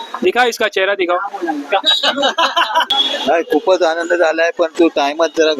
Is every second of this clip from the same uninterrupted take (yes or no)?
no